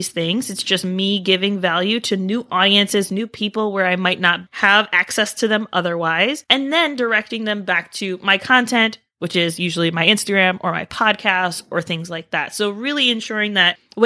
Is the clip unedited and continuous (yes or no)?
yes